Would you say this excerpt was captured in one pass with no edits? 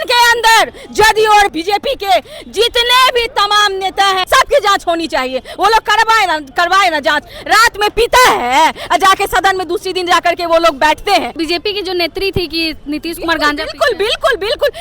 no; 3 cuts; at 1.5 s, 4.2 s, 11.3 s

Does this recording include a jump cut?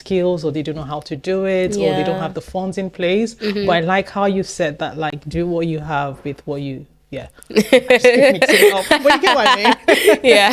no; 0 cuts

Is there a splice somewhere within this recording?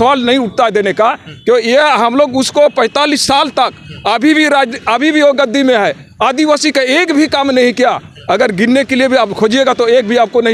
no; 0 cuts

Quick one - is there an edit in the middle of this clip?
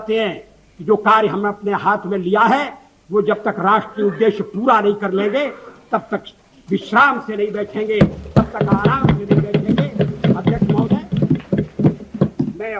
no; 0 cuts

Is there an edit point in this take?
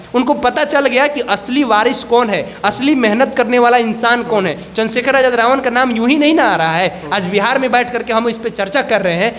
no; 0 cuts

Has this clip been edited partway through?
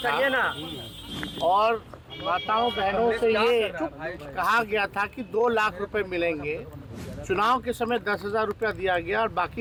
no; 0 cuts

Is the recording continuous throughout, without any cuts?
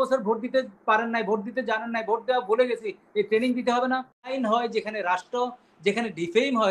no; 1 cut; at 4.3 s

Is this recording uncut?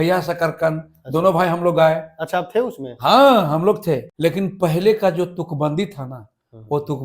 no; 1 cut; at 4.1 s

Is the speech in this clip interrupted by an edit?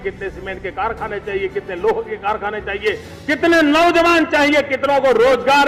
no; 0 cuts

